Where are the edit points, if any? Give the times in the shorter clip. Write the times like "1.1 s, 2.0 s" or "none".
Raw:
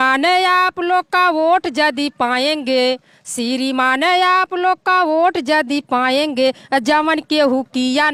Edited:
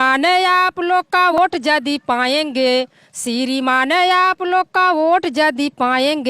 1.4 s